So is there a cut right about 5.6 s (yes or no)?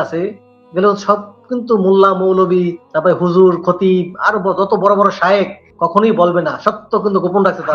yes